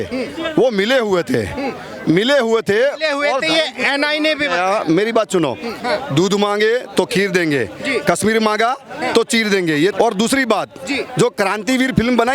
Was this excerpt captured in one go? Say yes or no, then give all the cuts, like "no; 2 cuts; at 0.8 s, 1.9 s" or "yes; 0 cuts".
no; 2 cuts; at 5.7 s, 9.9 s